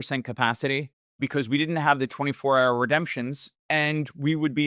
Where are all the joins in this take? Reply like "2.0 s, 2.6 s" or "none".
1.0 s, 3.5 s